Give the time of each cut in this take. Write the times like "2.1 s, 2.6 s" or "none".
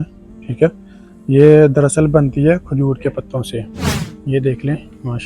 3.6 s

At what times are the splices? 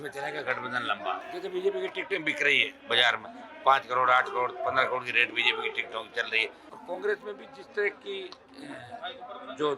1.2 s, 6.7 s

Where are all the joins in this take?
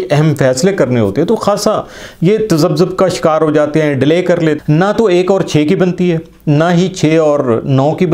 4.6 s

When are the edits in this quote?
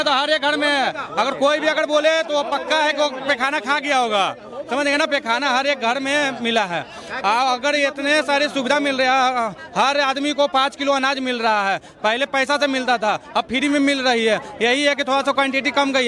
none

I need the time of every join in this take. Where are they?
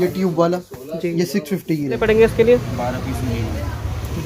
2.0 s

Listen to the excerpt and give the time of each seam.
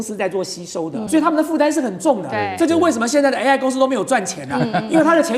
1.1 s

